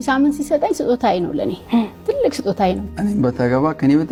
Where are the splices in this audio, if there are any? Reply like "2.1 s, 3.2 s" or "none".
none